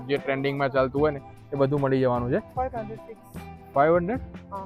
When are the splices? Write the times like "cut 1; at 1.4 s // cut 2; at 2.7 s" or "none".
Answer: cut 1; at 2.5 s